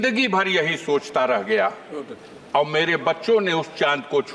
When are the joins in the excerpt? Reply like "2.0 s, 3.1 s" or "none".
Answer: none